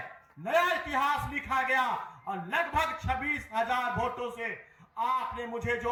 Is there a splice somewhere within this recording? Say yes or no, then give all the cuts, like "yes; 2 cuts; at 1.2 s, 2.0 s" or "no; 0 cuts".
no; 0 cuts